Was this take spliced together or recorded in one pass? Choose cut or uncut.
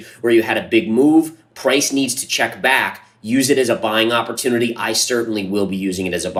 uncut